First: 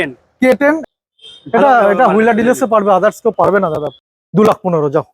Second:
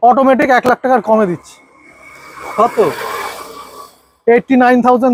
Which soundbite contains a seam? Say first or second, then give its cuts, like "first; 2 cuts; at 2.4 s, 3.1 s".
first; 2 cuts; at 0.8 s, 3.6 s